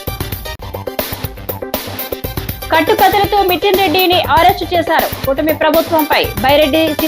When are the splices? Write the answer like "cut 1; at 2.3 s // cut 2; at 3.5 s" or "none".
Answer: cut 1; at 2.4 s